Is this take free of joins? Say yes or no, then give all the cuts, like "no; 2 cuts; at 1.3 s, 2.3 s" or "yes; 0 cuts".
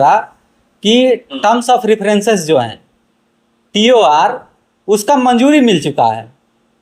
yes; 0 cuts